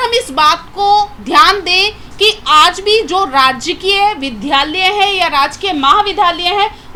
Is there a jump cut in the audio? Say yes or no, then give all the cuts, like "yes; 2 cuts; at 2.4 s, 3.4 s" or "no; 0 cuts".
no; 0 cuts